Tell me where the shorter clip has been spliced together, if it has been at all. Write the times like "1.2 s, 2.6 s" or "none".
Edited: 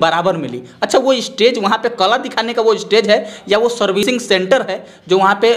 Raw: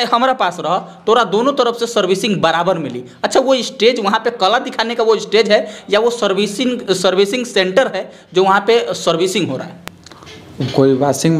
4.0 s